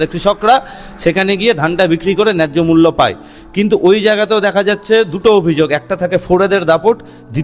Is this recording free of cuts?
yes; 0 cuts

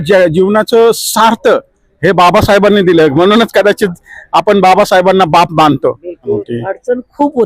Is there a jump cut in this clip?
yes; 1 cut; at 6.5 s

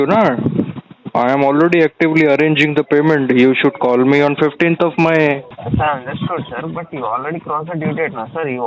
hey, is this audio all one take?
no; 1 cut; at 5.5 s

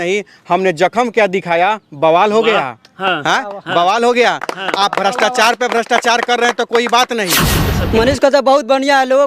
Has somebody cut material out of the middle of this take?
yes; 1 cut; at 7.6 s

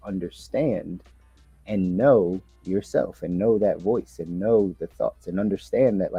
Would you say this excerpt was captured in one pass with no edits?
yes; 0 cuts

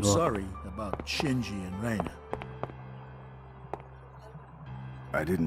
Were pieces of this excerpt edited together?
yes; 1 cut; at 3.9 s

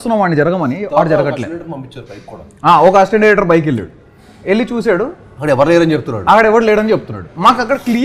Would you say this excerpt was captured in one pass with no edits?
yes; 0 cuts

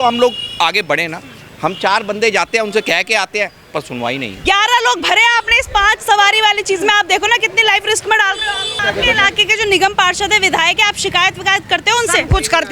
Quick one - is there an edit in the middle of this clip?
yes; 2 cuts; at 4.3 s, 8.8 s

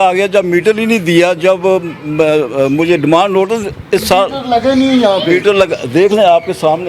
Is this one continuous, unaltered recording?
yes; 0 cuts

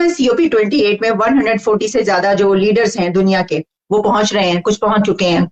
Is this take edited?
no; 0 cuts

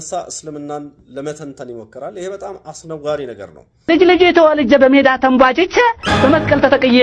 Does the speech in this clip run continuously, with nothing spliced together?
no; 1 cut; at 3.8 s

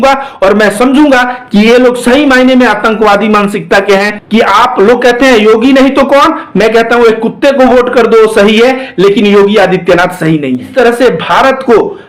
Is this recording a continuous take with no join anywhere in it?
no; 2 cuts; at 4.2 s, 10.7 s

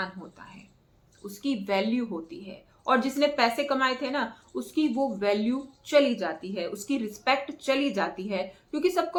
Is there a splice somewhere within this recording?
no; 0 cuts

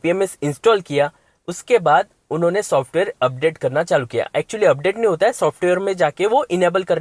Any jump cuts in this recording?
no; 0 cuts

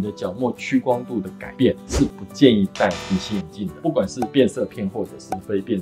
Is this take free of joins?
yes; 0 cuts

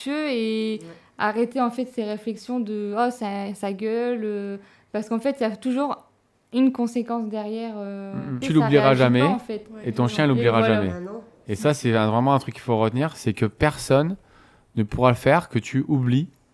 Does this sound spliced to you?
yes; 1 cut; at 8.4 s

